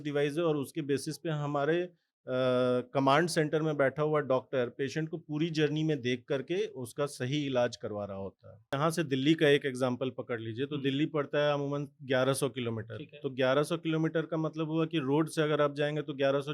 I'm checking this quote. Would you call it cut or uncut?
cut